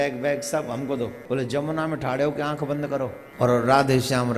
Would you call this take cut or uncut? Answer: cut